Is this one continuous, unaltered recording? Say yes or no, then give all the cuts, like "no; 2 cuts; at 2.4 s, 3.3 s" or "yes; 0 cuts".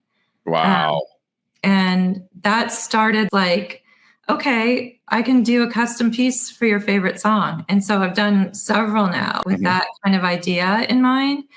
no; 2 cuts; at 3.3 s, 9.4 s